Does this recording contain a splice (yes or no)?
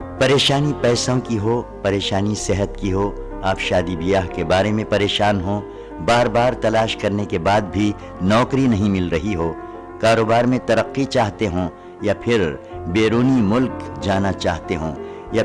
no